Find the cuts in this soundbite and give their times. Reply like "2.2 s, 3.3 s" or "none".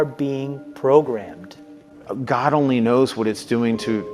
none

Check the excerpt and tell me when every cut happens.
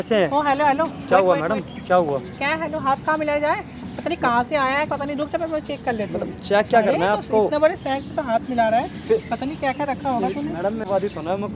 none

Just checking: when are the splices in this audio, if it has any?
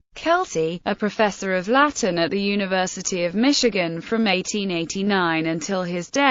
2.7 s

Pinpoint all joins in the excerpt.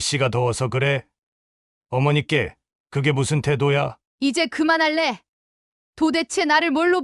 4.0 s

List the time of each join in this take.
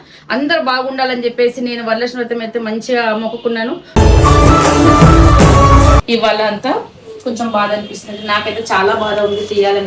3.9 s, 6.0 s

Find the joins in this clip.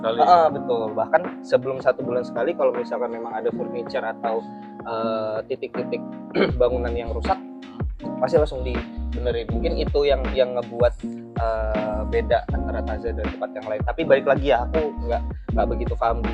none

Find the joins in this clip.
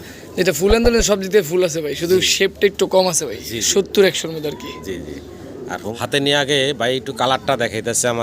5.9 s

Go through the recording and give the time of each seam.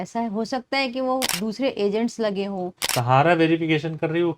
2.9 s

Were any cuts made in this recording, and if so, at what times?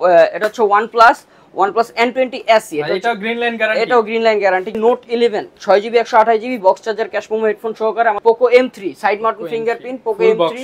4.7 s, 8.2 s

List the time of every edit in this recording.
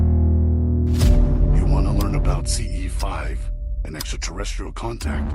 1.5 s

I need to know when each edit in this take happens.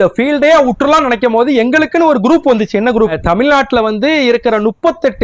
3.1 s

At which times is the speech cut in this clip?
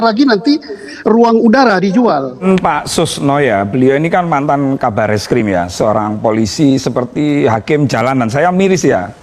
2.4 s

